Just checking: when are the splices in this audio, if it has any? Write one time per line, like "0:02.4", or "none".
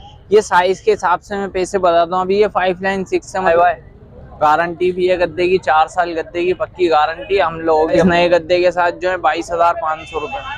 0:03.5
0:08.0